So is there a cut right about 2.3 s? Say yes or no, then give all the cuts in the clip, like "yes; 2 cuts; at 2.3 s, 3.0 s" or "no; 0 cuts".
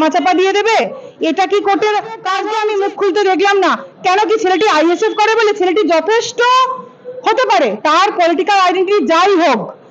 yes; 1 cut; at 2.3 s